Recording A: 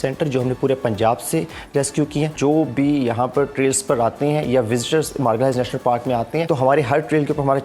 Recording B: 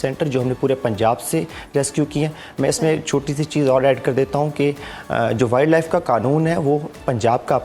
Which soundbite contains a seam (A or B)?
A